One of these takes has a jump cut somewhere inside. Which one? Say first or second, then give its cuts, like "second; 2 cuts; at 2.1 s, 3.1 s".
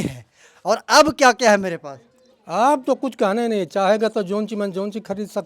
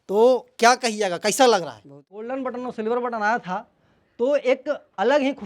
second; 1 cut; at 2.2 s